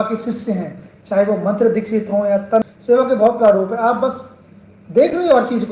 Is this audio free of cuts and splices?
no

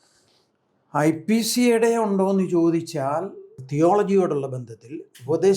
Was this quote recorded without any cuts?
no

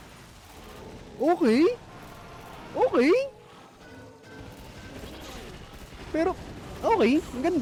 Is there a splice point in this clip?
no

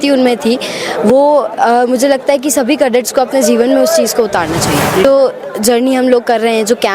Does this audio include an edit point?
yes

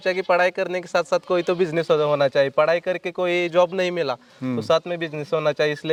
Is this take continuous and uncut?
yes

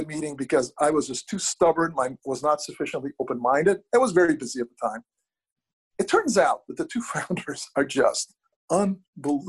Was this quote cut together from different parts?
yes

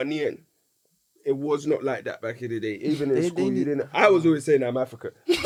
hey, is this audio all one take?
yes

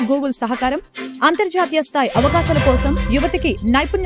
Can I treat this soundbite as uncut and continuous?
yes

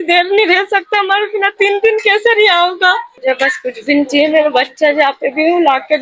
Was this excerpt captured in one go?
no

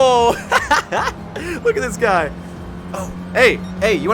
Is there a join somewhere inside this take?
no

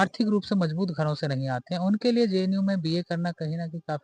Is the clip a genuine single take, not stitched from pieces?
yes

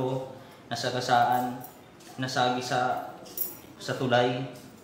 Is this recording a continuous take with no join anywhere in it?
yes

